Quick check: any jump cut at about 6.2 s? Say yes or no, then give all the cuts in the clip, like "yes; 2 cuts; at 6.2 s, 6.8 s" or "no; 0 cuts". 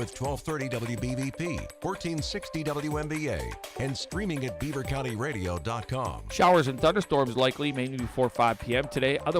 yes; 1 cut; at 6.2 s